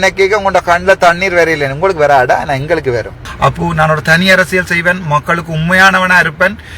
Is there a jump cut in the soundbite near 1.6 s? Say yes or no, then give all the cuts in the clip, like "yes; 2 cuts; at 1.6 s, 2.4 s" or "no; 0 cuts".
no; 1 cut; at 3.2 s